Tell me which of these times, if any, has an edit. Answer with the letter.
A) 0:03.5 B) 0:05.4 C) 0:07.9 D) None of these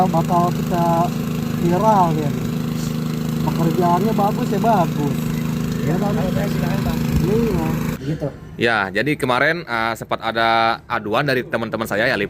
C